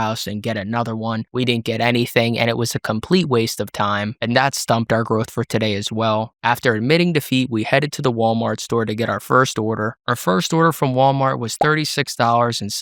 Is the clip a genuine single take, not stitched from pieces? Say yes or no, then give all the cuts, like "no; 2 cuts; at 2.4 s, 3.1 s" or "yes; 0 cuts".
yes; 0 cuts